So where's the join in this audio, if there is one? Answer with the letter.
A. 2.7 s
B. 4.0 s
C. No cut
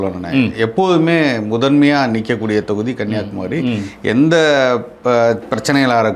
C